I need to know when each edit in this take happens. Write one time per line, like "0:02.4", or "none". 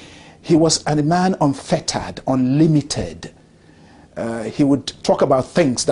none